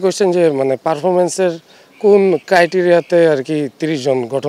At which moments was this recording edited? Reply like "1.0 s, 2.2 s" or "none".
none